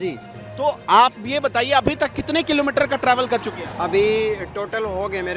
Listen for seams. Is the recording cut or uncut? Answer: uncut